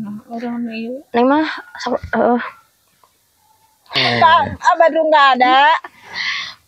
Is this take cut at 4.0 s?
yes; 1 cut; at 4.0 s

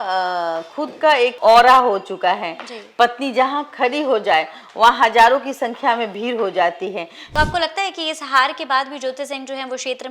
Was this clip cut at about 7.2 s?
yes; 1 cut; at 7.2 s

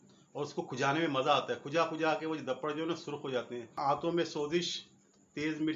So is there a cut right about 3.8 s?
yes; 1 cut; at 3.8 s

